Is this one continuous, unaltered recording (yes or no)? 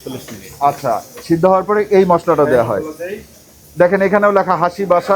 no